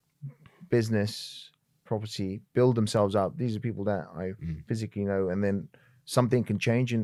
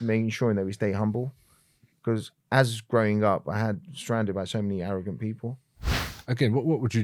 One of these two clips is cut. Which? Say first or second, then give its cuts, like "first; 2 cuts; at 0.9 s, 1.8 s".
second; 1 cut; at 5.9 s